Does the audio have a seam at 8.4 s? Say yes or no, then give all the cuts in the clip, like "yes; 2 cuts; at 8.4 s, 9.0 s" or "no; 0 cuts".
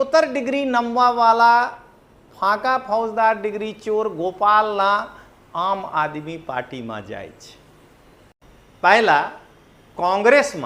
yes; 1 cut; at 8.4 s